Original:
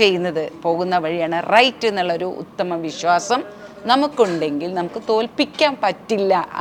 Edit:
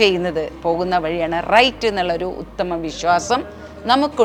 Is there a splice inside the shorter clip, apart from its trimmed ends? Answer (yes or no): no